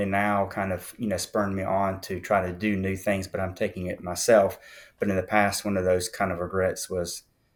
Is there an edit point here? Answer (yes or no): no